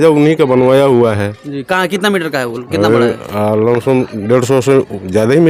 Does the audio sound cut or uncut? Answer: uncut